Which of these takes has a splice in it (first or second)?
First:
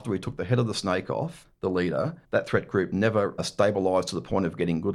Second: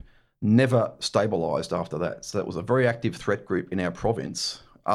first